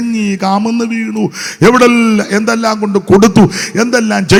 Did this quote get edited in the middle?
no; 0 cuts

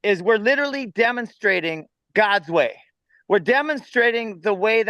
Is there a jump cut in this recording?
no; 0 cuts

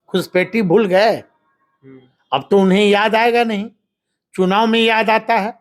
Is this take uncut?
yes; 0 cuts

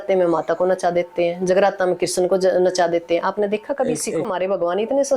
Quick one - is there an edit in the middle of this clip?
yes; 1 cut; at 4.3 s

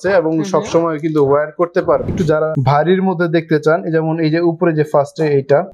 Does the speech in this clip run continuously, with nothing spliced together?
no; 1 cut; at 2.2 s

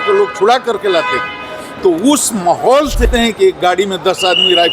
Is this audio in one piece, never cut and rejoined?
no; 1 cut; at 3.1 s

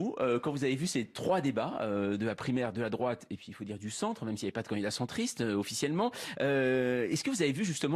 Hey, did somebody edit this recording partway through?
yes; 1 cut; at 3.6 s

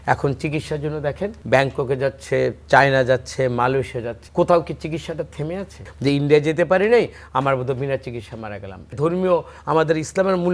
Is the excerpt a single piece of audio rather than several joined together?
no; 4 cuts; at 1.4 s, 4.2 s, 5.8 s, 8.9 s

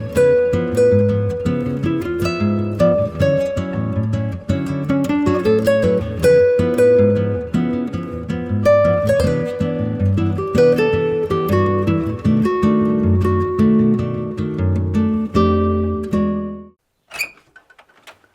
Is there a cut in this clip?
yes; 1 cut; at 16.5 s

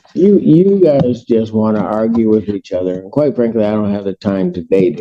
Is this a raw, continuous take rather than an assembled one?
yes; 0 cuts

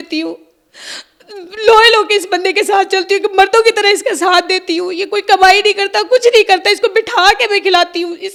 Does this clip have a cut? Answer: no; 0 cuts

